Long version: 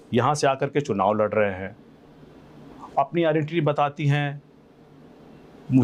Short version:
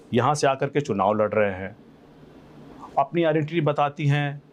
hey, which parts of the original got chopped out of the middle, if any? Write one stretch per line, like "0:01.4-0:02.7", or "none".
none